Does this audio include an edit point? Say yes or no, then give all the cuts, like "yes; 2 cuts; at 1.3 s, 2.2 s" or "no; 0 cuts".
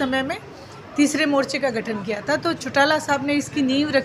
no; 0 cuts